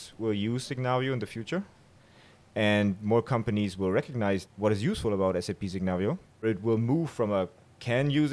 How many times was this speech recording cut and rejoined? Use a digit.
2